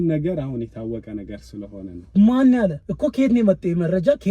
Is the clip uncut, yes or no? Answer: no